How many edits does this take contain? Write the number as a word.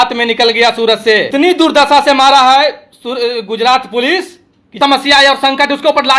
two